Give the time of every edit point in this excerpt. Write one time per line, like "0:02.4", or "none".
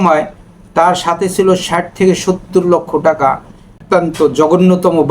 0:03.7